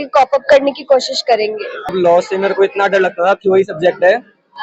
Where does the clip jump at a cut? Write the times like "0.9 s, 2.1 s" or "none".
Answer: 1.9 s